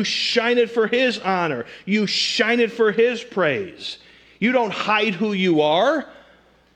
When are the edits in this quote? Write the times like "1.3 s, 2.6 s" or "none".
none